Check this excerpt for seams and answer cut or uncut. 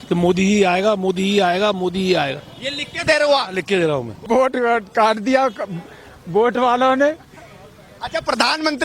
cut